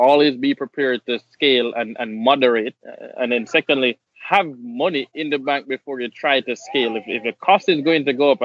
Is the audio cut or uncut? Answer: cut